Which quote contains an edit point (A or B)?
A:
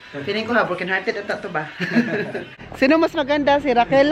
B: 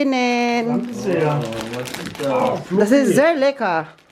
A